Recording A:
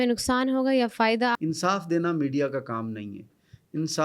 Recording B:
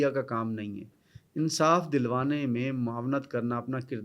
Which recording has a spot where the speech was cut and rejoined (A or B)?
A